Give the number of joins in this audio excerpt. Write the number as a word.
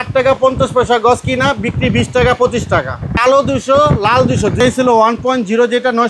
two